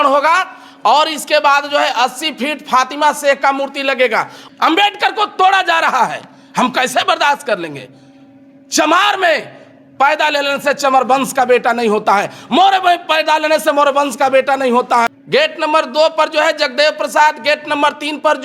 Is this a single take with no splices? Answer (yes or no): no